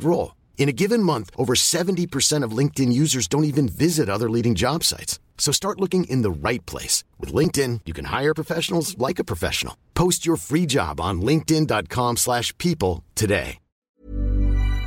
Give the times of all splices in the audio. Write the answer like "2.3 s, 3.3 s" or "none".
13.9 s

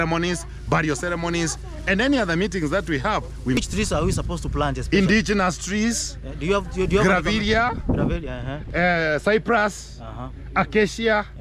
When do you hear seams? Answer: 3.6 s

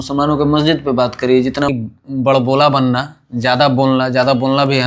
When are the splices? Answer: 1.7 s

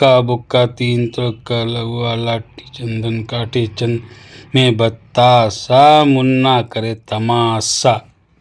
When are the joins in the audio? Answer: none

